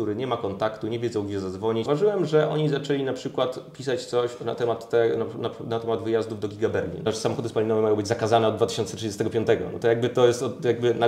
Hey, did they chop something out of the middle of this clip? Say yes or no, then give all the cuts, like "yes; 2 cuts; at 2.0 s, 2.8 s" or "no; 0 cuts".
yes; 2 cuts; at 1.9 s, 7.1 s